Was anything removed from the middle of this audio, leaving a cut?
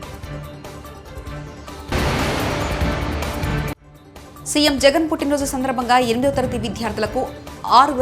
yes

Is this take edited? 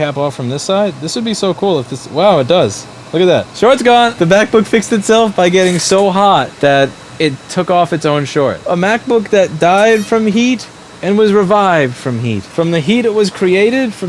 yes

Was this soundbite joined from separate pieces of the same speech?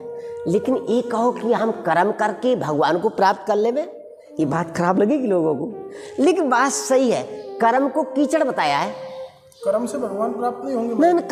no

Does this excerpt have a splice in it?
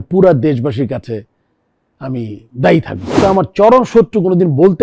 yes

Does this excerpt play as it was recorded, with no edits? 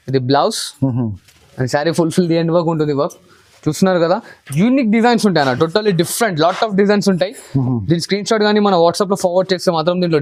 yes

